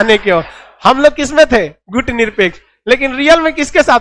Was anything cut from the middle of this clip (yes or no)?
no